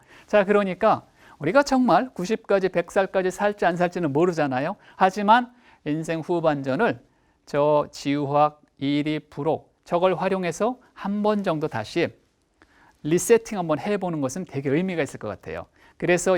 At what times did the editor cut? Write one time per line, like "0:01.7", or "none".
none